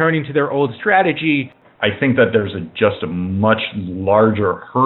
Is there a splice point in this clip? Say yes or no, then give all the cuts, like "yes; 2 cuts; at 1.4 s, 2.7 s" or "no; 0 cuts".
yes; 1 cut; at 1.5 s